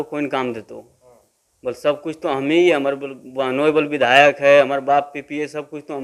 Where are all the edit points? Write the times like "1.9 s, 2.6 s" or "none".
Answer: none